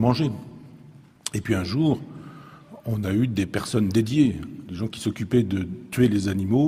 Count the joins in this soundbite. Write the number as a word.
one